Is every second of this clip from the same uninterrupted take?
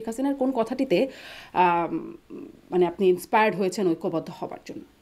yes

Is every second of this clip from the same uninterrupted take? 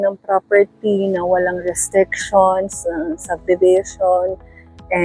yes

